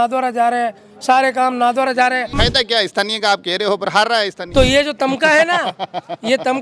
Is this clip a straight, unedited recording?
no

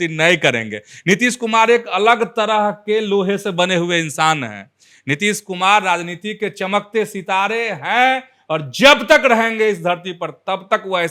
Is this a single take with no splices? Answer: yes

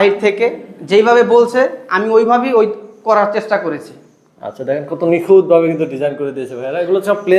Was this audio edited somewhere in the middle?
no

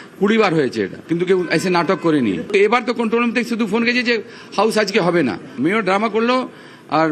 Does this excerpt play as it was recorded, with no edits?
yes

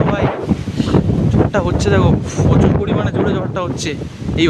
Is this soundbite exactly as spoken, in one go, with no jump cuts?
yes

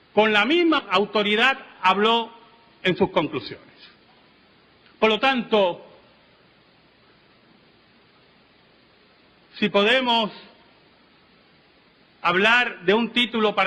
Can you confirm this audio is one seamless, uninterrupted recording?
no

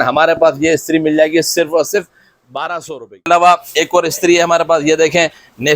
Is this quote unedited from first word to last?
no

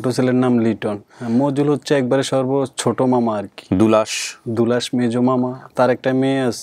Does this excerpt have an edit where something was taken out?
yes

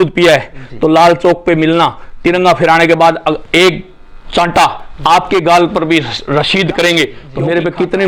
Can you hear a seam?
yes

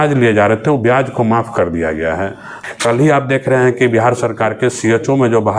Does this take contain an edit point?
yes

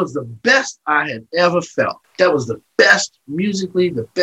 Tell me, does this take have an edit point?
yes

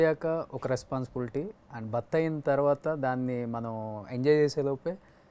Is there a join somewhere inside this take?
no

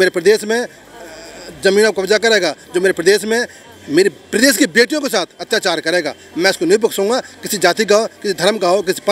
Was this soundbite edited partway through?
no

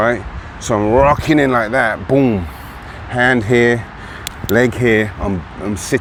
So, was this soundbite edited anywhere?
no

